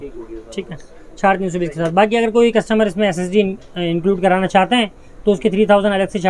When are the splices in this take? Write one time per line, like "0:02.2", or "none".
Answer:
none